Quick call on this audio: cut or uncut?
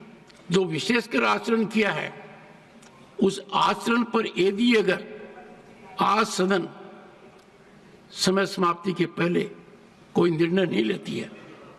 uncut